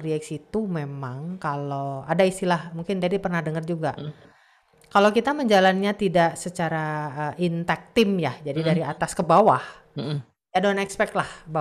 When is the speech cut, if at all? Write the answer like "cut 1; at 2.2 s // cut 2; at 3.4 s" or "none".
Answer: none